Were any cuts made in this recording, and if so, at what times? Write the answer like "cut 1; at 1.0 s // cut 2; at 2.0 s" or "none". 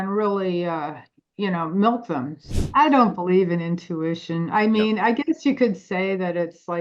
cut 1; at 2.5 s